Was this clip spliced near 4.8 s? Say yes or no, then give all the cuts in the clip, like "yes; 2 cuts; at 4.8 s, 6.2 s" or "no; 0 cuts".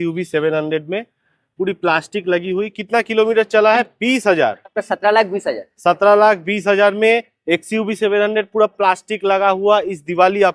yes; 1 cut; at 4.8 s